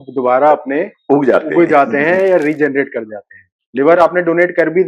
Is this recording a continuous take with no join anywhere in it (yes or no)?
no